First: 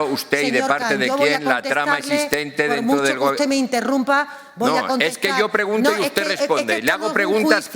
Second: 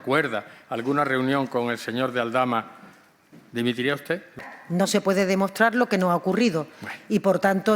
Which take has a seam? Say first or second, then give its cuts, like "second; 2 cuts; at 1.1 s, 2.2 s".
second; 1 cut; at 4.4 s